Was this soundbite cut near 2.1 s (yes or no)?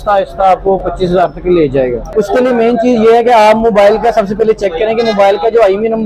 yes